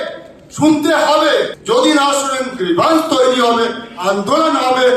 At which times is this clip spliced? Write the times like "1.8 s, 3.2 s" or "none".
1.6 s